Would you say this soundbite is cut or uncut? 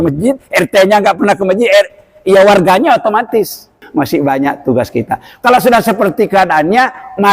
cut